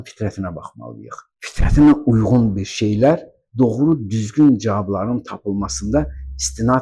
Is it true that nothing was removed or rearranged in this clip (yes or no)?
yes